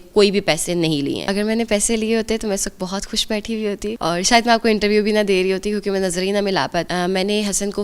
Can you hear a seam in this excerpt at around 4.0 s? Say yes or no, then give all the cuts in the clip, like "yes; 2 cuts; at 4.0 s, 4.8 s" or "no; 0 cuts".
yes; 3 cuts; at 1.2 s, 4.0 s, 6.9 s